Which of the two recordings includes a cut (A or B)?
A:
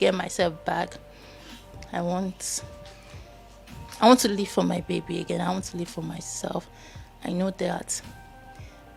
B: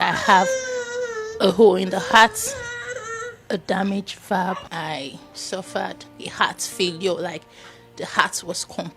B